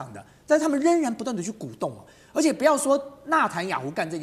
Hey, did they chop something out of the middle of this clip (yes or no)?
no